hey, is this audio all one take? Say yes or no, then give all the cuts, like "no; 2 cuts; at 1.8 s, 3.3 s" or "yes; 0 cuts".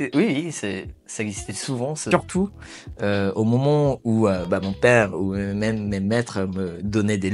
no; 1 cut; at 2.1 s